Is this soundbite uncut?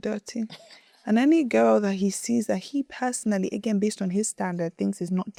yes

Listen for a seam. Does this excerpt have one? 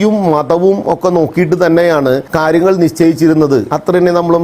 yes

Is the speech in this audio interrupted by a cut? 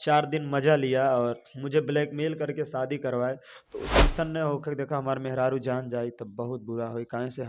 yes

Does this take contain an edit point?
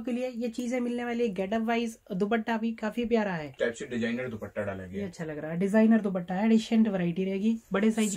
yes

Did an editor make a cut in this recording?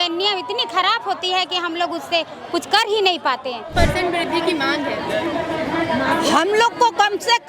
yes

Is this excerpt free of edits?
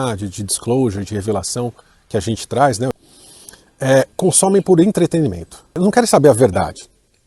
no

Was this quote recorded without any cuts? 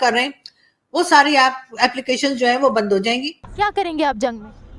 no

